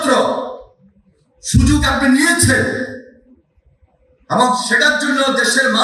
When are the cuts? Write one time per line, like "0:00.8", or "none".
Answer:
none